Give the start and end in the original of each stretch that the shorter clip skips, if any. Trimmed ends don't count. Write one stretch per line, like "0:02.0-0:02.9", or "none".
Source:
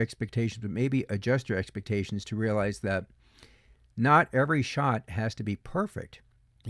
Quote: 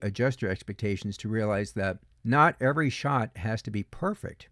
0:03.2-0:03.8